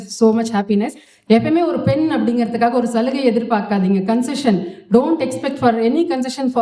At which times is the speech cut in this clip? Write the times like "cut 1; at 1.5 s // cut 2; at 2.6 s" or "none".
cut 1; at 1.1 s